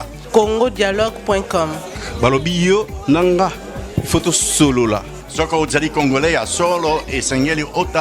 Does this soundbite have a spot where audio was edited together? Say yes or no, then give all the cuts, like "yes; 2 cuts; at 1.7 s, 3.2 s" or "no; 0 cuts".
no; 0 cuts